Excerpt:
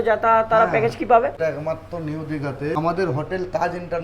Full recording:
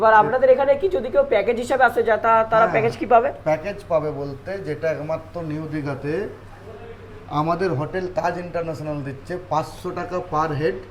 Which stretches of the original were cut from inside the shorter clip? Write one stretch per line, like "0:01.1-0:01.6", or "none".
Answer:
0:03.4-0:04.8
0:06.2-0:07.4